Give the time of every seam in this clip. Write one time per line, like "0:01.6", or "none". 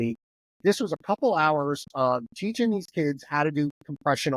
none